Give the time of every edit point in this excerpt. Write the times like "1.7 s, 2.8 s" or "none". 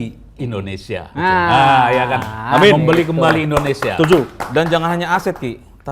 none